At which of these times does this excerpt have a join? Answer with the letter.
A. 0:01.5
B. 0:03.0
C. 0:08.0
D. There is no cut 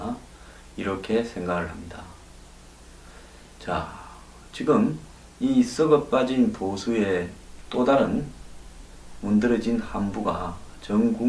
C